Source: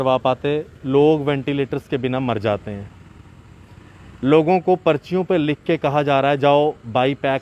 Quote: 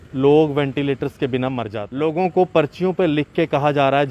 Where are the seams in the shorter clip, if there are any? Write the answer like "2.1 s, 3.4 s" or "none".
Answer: 1.7 s